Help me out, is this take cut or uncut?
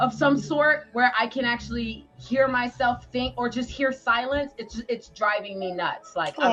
uncut